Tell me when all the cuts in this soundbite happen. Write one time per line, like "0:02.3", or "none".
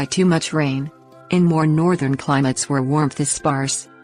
0:00.9

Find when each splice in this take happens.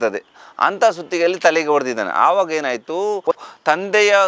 0:03.3

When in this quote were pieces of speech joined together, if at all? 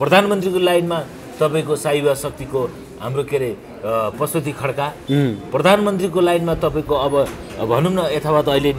none

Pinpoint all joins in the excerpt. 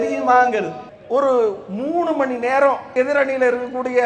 0:00.9
0:02.9

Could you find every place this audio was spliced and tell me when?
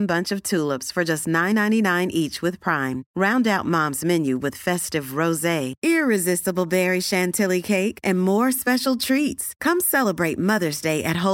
none

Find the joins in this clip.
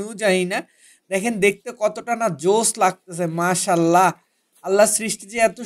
none

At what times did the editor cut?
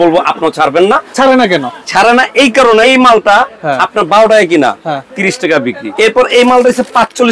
0:01.1
0:02.8
0:05.8

